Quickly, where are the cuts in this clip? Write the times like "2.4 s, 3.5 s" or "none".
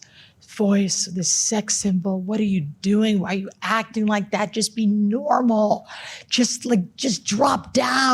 none